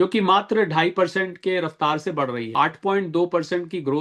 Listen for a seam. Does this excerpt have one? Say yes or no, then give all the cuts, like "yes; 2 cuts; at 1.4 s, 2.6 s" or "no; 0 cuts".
yes; 1 cut; at 2.5 s